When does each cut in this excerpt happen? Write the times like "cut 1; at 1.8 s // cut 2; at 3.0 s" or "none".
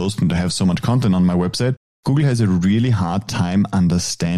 none

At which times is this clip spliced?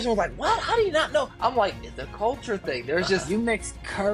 cut 1; at 3.2 s

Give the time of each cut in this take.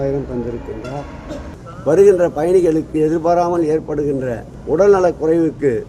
cut 1; at 1.6 s // cut 2; at 4.5 s

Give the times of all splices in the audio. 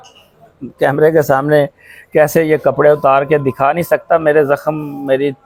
none

